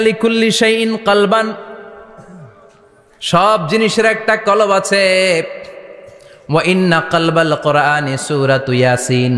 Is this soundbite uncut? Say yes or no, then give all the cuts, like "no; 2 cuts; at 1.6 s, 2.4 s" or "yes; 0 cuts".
yes; 0 cuts